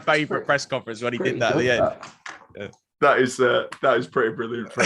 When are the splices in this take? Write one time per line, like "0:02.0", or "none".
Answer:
none